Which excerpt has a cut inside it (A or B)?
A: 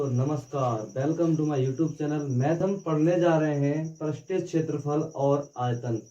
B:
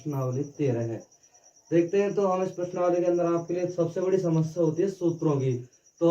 A